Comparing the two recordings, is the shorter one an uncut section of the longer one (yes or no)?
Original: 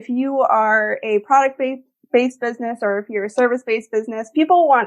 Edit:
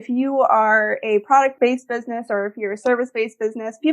no